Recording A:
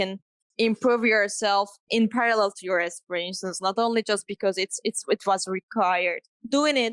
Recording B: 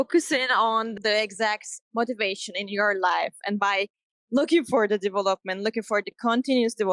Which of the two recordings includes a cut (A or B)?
B